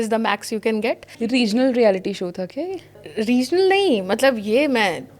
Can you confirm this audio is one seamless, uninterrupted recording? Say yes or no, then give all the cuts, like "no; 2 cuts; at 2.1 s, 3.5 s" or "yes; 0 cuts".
no; 2 cuts; at 1.4 s, 3.0 s